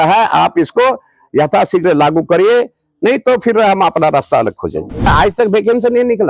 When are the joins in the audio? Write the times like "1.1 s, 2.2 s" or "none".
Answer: 5.0 s